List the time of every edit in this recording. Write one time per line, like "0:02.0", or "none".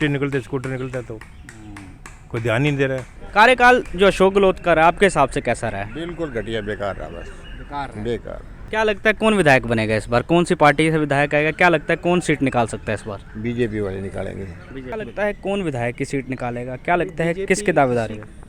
0:03.1
0:08.5
0:14.9